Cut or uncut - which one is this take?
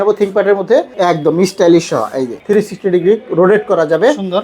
cut